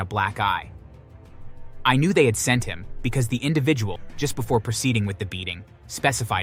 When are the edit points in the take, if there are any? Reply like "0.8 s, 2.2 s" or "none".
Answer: 4.0 s

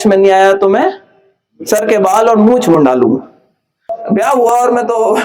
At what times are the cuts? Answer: 4.0 s

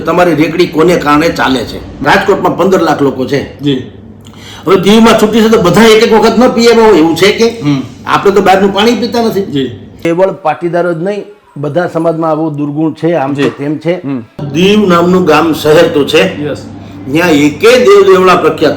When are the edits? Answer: 2.0 s, 10.1 s, 14.5 s

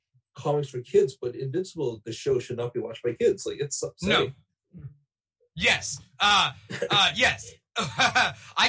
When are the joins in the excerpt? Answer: none

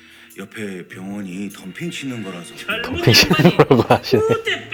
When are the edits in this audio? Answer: none

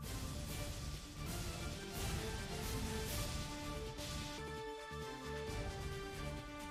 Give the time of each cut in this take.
none

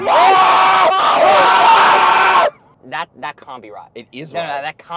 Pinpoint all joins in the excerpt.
2.7 s

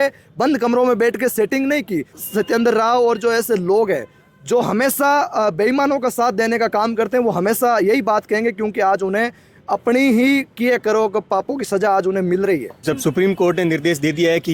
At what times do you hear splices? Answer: 2.2 s, 12.7 s

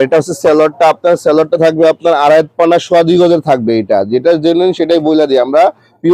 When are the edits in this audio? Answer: none

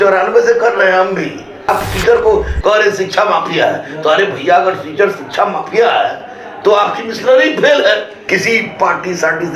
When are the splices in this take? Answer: 1.7 s, 8.2 s

